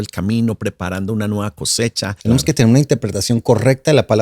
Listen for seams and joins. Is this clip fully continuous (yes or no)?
no